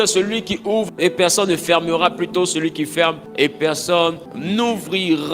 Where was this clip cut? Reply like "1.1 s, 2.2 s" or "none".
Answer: 0.9 s, 3.2 s, 4.3 s